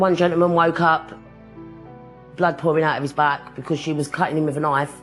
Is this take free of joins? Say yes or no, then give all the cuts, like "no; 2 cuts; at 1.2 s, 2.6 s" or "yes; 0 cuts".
yes; 0 cuts